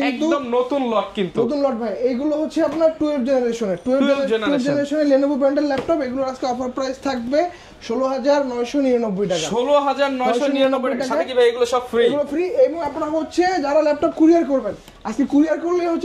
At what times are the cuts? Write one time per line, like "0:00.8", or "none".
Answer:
none